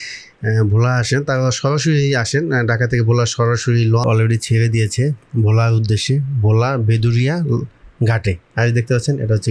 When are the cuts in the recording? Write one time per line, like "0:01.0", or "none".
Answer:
0:04.0

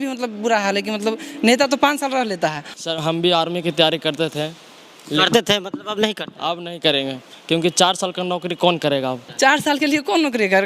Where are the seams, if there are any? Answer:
0:02.7
0:09.3

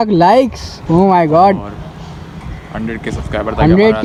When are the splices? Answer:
none

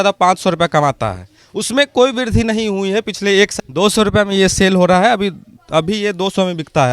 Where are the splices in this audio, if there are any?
0:03.5

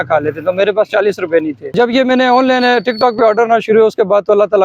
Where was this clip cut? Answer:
0:01.7

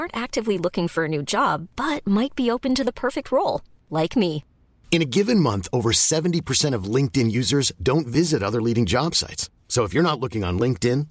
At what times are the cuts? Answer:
none

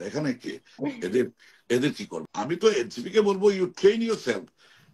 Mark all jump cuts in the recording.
0:02.1

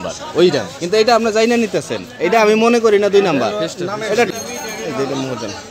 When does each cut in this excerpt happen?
0:04.3

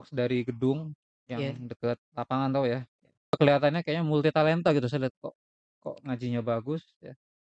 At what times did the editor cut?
0:03.4

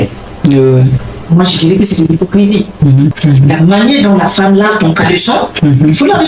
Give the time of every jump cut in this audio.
0:01.1
0:03.2

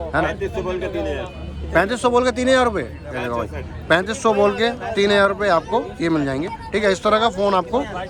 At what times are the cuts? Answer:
none

